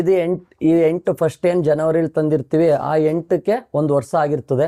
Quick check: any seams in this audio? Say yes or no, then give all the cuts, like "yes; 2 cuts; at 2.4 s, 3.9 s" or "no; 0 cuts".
no; 0 cuts